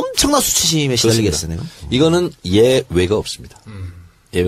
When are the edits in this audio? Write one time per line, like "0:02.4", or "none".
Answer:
0:02.0